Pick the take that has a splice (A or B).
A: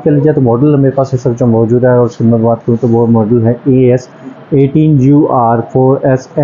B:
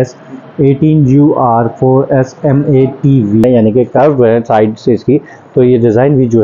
B